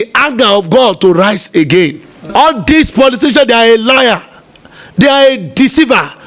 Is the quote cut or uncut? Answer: cut